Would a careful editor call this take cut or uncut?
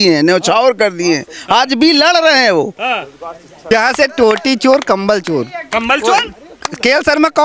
cut